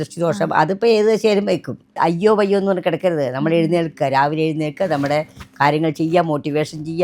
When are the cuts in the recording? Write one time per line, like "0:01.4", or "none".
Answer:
0:01.8